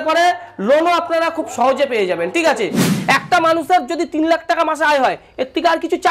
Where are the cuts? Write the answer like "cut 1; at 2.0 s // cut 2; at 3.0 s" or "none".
cut 1; at 2.9 s